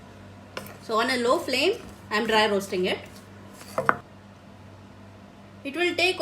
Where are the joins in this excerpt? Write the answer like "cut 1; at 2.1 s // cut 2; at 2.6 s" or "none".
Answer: cut 1; at 4.0 s